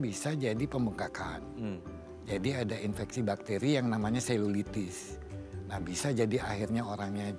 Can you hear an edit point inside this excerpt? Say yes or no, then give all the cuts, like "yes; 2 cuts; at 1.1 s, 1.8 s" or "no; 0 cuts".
no; 0 cuts